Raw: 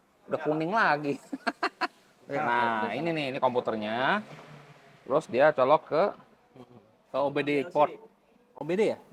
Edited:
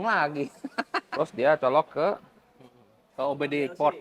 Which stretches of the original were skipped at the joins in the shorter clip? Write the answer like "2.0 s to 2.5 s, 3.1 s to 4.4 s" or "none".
1.8 s to 5.0 s